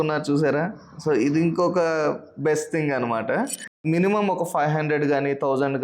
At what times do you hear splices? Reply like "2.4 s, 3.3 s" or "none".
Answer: 3.8 s

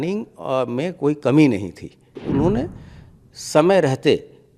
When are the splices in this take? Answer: 2.1 s

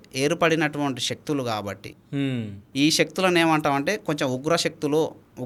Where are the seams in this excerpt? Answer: none

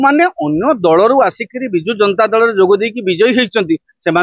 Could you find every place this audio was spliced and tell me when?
none

